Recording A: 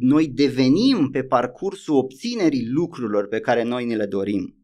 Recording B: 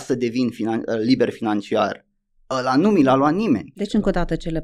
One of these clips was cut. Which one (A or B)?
B